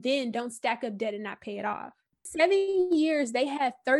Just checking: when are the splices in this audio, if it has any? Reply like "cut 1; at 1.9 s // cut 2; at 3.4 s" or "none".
cut 1; at 2.3 s